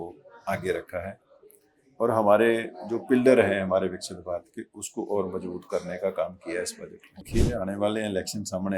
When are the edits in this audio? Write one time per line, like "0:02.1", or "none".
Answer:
0:07.3